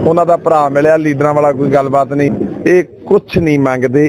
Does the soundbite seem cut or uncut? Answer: cut